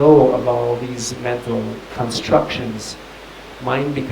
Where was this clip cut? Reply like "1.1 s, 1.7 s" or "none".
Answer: 1.9 s